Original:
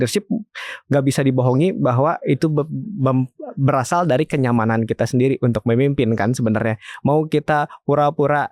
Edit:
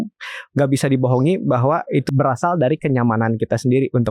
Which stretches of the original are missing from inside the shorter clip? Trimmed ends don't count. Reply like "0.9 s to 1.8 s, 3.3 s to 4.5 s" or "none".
2.4 s to 3.5 s